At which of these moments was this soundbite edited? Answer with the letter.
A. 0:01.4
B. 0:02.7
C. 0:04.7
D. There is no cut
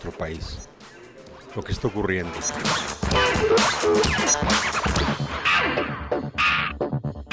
D